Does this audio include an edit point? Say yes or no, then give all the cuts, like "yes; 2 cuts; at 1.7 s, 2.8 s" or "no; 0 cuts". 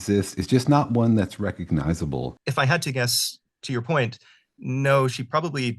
yes; 1 cut; at 2.4 s